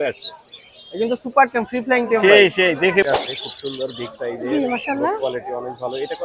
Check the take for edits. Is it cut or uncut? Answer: cut